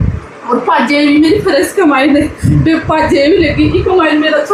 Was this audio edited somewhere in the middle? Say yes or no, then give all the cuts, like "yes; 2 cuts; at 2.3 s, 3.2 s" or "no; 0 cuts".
no; 0 cuts